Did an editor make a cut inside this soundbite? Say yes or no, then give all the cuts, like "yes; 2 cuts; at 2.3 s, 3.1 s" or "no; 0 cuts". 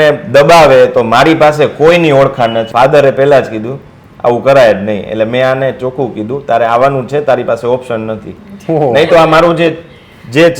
yes; 1 cut; at 2.7 s